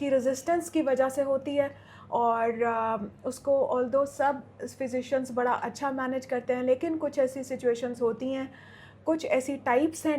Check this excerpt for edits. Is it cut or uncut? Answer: uncut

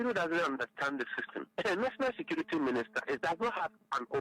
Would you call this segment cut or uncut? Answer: cut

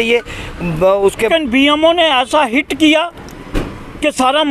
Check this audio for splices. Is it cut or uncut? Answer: cut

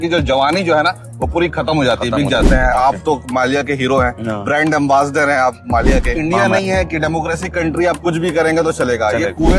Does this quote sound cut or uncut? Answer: cut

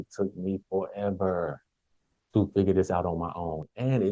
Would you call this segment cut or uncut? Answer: uncut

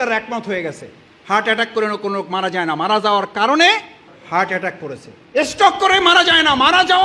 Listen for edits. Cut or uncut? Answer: uncut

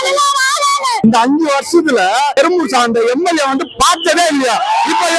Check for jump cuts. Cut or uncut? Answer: cut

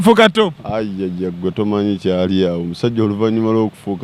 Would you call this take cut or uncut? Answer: uncut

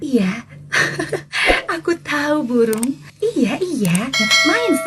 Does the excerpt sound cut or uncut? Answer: cut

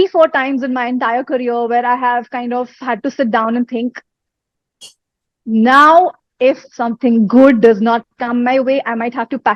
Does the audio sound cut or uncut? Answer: uncut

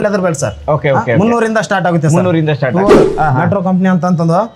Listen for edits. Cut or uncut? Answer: cut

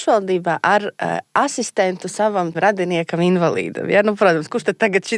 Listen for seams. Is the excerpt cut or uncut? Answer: cut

